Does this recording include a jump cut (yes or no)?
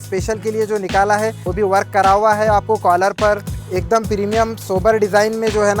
yes